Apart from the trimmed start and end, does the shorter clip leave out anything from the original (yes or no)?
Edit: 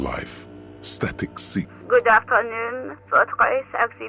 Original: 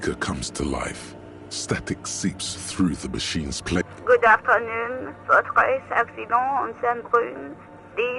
yes